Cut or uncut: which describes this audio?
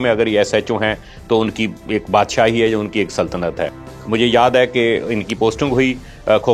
uncut